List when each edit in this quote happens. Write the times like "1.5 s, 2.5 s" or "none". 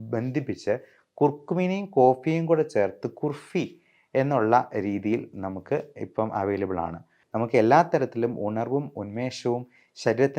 7.1 s